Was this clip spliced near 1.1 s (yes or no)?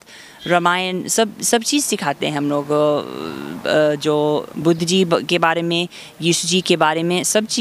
no